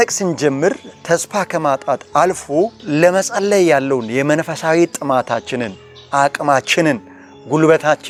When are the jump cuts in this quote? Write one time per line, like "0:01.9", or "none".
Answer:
none